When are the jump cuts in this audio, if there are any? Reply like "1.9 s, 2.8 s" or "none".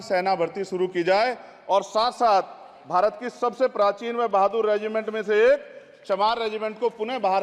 none